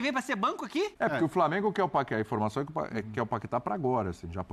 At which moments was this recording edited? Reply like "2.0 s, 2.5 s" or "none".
0.9 s